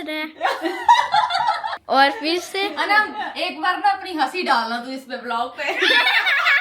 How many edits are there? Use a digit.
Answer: 1